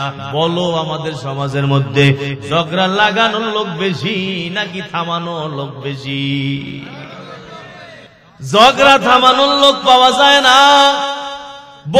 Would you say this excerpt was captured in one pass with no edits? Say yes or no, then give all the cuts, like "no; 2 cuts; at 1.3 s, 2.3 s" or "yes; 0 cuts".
no; 1 cut; at 8.1 s